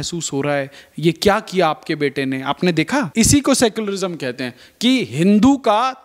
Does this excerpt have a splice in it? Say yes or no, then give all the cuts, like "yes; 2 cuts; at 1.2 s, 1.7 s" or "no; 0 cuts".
yes; 1 cut; at 3.1 s